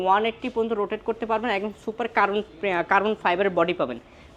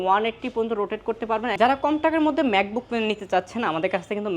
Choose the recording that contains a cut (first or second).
second